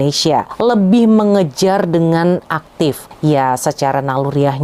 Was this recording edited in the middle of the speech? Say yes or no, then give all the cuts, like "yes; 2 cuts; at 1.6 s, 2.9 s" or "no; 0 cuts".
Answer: no; 0 cuts